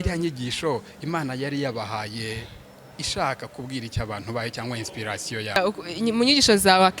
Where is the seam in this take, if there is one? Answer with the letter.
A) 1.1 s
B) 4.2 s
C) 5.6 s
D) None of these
C